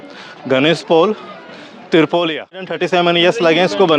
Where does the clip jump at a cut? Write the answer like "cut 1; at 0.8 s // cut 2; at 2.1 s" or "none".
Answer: cut 1; at 2.8 s